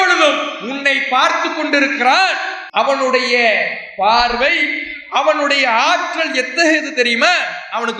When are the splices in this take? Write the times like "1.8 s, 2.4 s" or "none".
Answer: 2.5 s